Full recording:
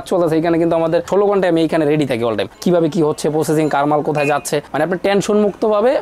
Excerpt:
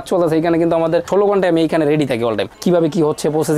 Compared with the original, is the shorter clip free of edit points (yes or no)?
yes